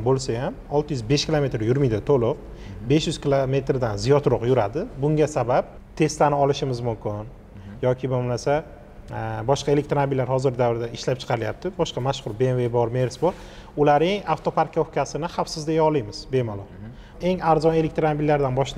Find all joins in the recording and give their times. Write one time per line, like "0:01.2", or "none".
0:05.8
0:17.0